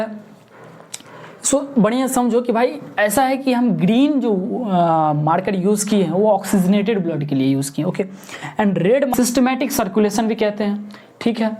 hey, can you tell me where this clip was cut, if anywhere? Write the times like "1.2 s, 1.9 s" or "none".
9.1 s